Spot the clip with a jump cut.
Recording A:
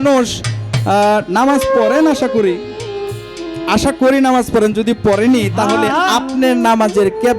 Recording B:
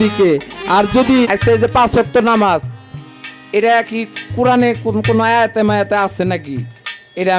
B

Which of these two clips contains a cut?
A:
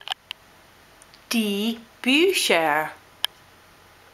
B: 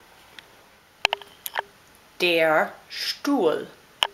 B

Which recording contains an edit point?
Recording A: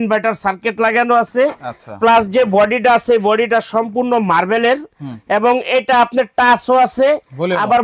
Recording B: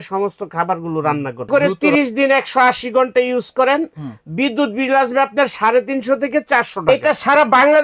B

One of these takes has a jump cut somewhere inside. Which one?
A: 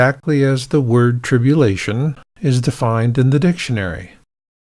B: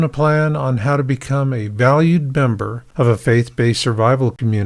B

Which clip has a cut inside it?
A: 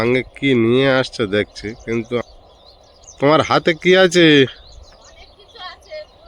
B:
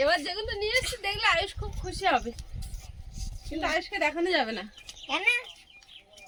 A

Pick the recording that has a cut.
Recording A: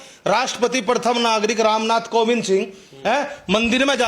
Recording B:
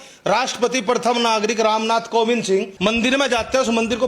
B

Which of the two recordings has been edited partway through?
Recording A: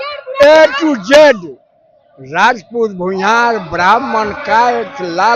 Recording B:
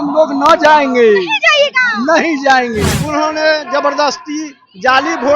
B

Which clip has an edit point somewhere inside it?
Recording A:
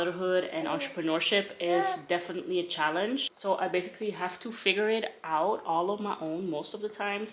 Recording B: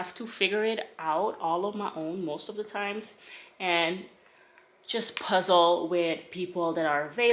A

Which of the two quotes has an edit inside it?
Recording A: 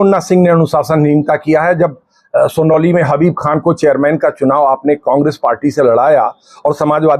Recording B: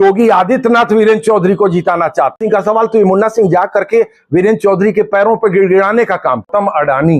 B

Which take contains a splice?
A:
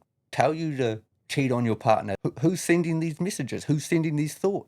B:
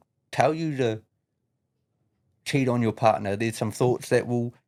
A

